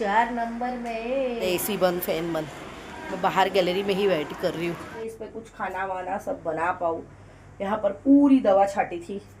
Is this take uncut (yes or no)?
no